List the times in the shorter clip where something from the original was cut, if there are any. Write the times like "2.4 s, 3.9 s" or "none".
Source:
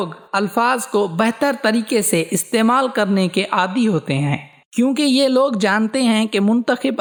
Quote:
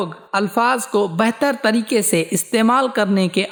none